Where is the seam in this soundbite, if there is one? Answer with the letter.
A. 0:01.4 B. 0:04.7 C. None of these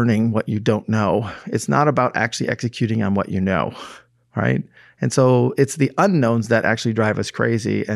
C